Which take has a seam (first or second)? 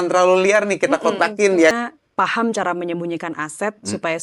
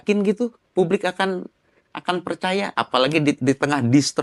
first